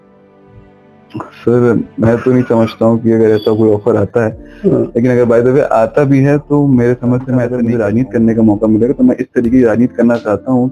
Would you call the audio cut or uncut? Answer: cut